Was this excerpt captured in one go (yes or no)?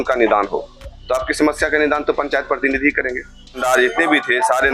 no